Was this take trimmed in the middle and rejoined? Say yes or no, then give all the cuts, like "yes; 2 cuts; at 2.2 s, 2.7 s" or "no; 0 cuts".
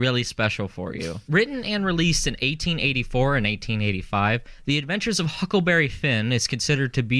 yes; 1 cut; at 4.5 s